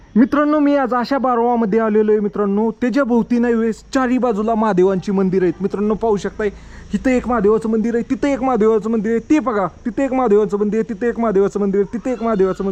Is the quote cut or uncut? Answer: uncut